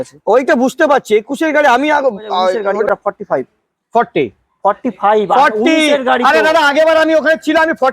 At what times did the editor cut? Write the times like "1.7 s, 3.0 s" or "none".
2.7 s